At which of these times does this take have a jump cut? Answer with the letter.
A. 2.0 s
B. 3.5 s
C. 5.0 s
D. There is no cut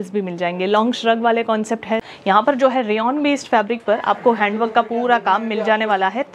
A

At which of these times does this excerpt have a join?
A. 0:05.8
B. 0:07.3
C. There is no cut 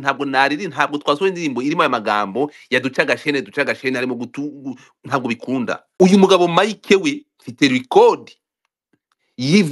A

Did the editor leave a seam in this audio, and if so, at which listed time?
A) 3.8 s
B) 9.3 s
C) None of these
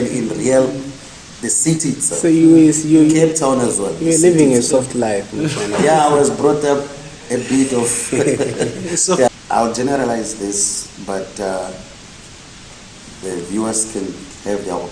B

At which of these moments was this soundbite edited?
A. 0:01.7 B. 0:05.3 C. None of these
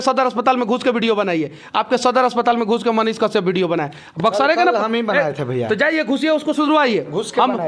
C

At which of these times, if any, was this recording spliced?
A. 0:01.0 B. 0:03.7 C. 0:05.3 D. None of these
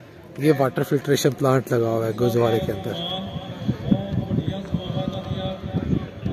D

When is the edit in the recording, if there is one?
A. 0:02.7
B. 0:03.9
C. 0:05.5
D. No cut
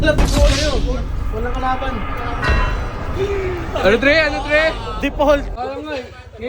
C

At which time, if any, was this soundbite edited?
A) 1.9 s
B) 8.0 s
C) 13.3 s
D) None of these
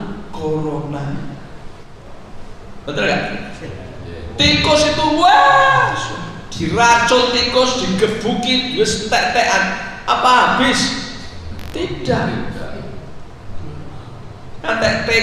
A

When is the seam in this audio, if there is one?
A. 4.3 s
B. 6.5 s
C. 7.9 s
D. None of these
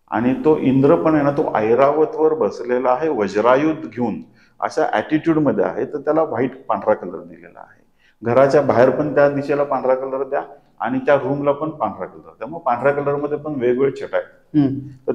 D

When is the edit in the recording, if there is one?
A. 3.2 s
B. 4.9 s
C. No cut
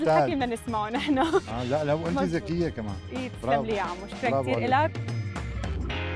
B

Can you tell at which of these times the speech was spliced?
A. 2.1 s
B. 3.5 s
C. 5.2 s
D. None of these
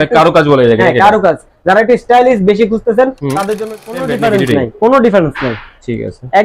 B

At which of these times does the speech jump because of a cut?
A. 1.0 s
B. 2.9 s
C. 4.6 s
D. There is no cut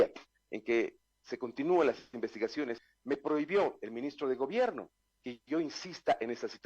B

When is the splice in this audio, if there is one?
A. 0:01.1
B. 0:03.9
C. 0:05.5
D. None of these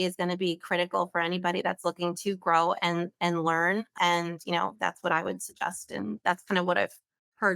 B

